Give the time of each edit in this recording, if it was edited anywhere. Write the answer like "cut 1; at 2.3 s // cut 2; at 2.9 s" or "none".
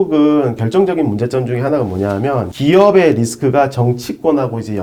none